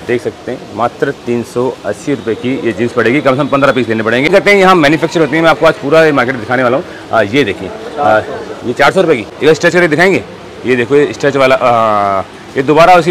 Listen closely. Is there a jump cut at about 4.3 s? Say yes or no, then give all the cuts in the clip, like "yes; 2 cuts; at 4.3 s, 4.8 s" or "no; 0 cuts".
yes; 2 cuts; at 4.3 s, 9.3 s